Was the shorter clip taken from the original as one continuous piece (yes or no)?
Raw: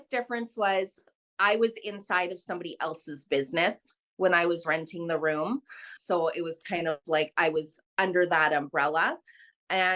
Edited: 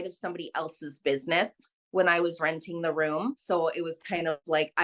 no